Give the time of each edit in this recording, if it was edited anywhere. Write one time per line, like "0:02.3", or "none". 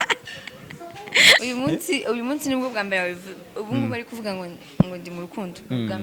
0:01.4